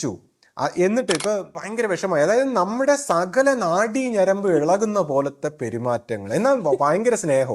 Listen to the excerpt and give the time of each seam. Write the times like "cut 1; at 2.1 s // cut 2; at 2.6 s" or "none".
cut 1; at 1.6 s